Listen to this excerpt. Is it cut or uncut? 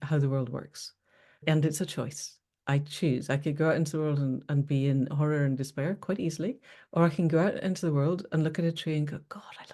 cut